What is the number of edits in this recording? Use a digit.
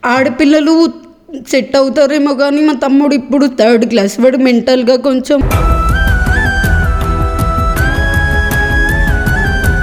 0